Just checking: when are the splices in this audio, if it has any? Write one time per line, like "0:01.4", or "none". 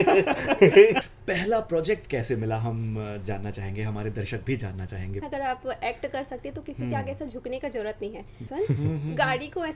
0:01.0
0:05.2
0:08.4